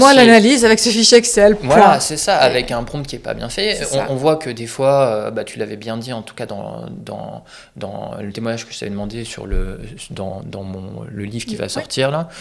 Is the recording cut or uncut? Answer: uncut